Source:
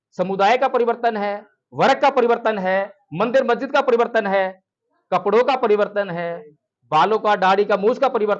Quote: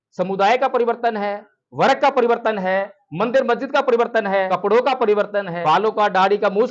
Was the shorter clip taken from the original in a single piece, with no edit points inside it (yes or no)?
no